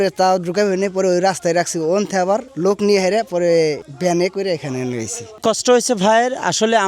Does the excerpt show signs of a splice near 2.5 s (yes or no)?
yes